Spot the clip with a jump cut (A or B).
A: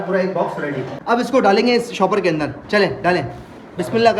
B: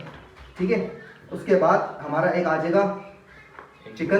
A